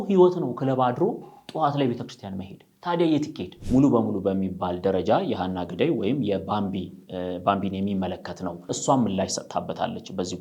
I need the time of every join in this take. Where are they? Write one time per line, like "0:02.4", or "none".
0:03.5
0:08.7